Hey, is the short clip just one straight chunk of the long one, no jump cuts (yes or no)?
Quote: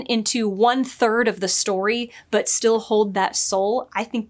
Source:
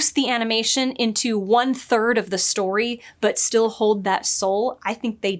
yes